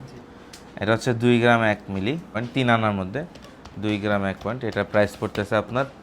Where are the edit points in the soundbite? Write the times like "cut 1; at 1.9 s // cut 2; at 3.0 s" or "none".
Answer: cut 1; at 2.4 s